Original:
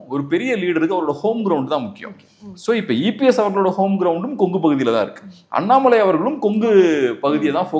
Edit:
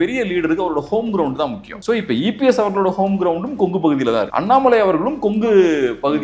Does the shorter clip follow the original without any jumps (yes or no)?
no